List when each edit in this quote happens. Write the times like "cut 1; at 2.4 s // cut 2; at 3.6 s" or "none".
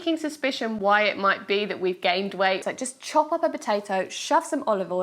cut 1; at 2.6 s